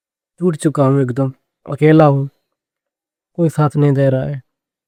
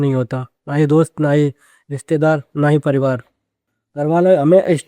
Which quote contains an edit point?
second; 1 cut; at 3.8 s

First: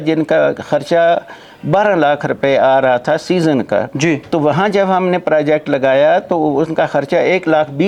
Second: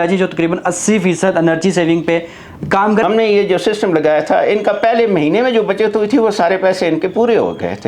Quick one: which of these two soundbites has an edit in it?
second; 1 cut; at 3.0 s

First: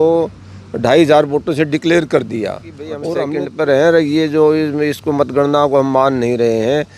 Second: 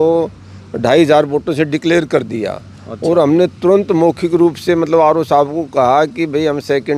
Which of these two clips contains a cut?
first; 1 cut; at 3.2 s

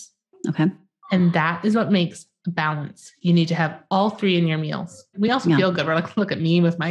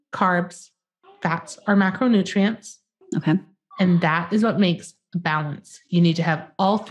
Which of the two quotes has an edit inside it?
first; 1 cut; at 5.3 s

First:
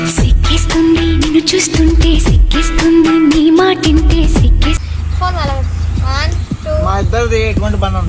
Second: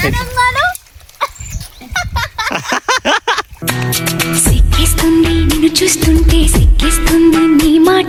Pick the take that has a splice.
first; 1 cut; at 4.8 s

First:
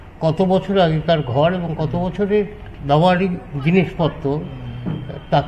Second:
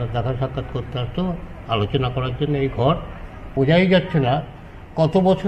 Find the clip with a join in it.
second; 1 cut; at 3.5 s

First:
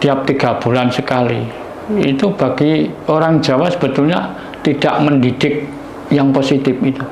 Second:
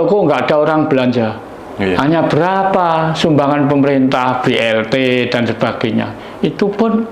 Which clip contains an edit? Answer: second; 1 cut; at 2.0 s

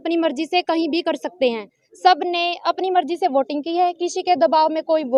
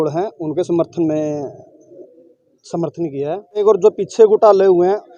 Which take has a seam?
second; 1 cut; at 3.6 s

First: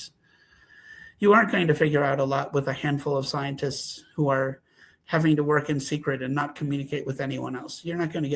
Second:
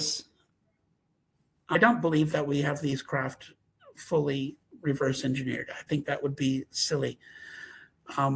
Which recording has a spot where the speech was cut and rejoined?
second; 1 cut; at 1.8 s

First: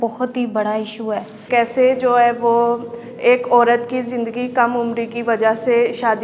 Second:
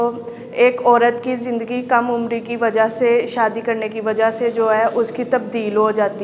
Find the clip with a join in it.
first; 1 cut; at 1.5 s

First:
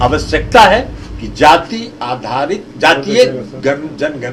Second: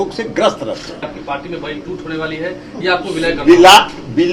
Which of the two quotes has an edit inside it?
second; 1 cut; at 1.0 s

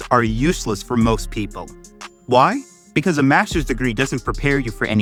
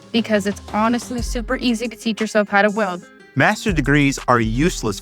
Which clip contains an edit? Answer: second; 1 cut; at 3.1 s

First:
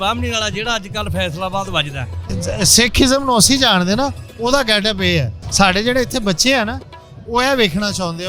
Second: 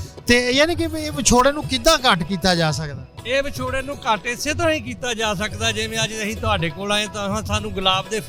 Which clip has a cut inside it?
first; 2 cuts; at 2.4 s, 5.4 s

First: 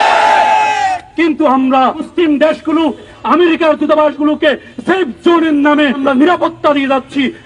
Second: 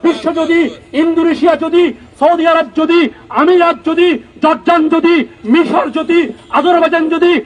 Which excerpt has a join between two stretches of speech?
first; 3 cuts; at 2.0 s, 3.1 s, 6.0 s

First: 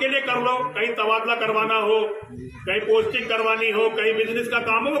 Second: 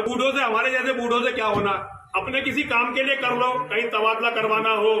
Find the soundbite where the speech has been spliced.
second; 1 cut; at 2.0 s

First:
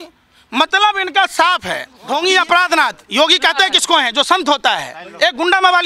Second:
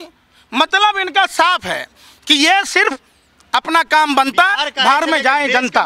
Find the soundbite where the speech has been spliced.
first; 1 cut; at 1.9 s

